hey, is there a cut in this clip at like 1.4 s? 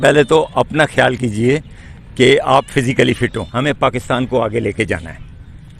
no; 1 cut; at 3.4 s

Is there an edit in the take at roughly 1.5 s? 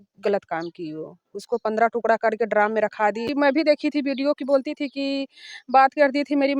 no; 1 cut; at 3.3 s

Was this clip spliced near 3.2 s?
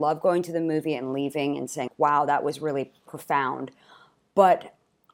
no; 1 cut; at 1.9 s

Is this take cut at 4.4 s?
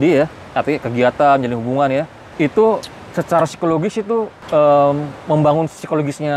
yes; 2 cuts; at 2.2 s, 4.4 s

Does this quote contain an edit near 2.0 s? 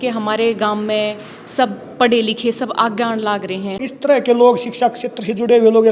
no; 1 cut; at 3.8 s

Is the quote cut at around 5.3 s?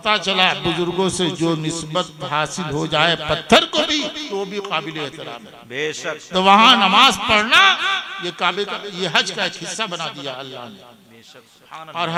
no; 0 cuts

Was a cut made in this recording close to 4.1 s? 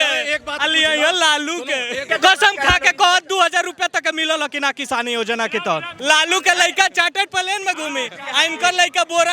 no; 2 cuts; at 2.0 s, 5.9 s

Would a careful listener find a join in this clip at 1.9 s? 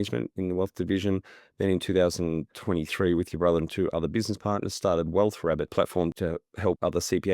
no; 1 cut; at 6.3 s

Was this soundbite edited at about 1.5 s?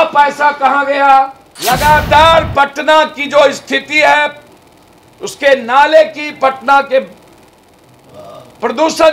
yes; 1 cut; at 1.5 s

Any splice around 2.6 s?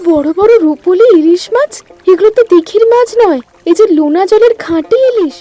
no; 0 cuts

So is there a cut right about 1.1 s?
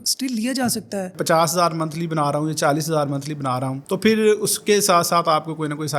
yes; 1 cut; at 1.1 s

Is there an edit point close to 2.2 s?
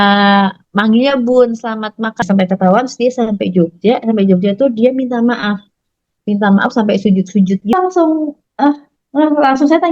yes; 2 cuts; at 2.2 s, 7.7 s

